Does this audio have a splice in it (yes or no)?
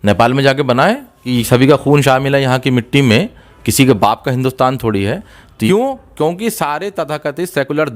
yes